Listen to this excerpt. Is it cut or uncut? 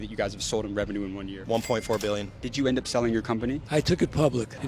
cut